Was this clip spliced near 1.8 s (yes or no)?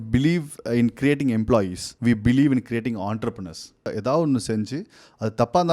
yes